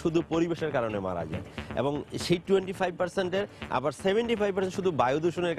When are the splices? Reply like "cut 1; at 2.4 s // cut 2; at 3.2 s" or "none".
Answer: none

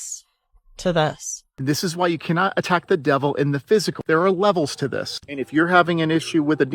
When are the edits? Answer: cut 1; at 1.5 s

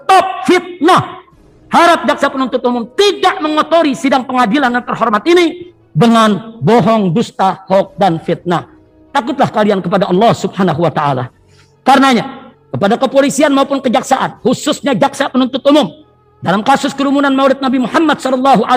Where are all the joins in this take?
none

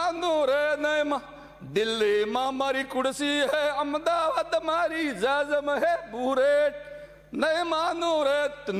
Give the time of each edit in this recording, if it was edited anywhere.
none

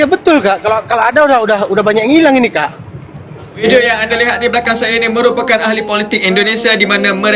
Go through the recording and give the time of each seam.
cut 1; at 3.6 s

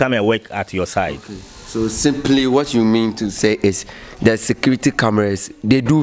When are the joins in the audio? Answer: none

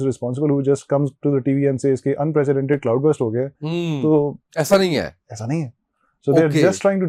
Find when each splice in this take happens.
none

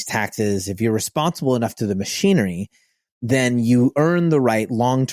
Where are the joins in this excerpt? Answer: none

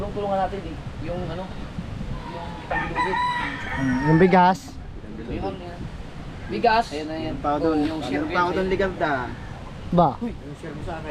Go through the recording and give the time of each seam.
none

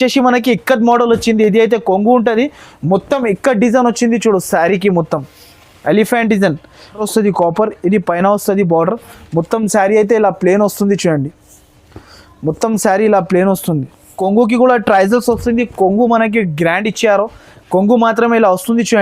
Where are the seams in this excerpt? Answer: cut 1; at 7.0 s // cut 2; at 14.2 s

